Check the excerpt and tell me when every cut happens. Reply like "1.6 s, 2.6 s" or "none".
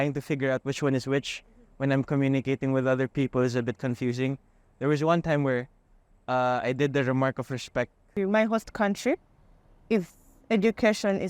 8.0 s